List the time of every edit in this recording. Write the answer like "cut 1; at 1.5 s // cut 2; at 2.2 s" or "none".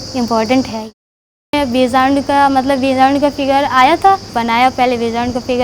cut 1; at 1.0 s // cut 2; at 4.3 s